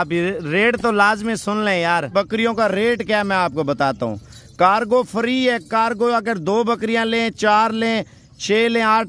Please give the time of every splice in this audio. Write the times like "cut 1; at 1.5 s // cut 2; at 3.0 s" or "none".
cut 1; at 2.1 s